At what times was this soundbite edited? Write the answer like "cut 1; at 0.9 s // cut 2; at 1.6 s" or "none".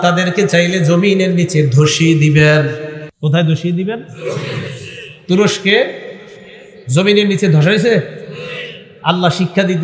cut 1; at 3.0 s